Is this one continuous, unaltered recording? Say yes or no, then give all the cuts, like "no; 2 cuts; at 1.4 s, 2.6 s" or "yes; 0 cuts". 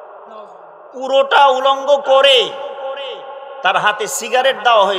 yes; 0 cuts